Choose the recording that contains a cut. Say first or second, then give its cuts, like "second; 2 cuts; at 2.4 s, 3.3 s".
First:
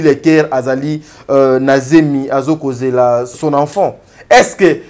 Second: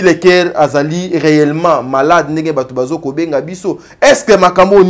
first; 1 cut; at 3.3 s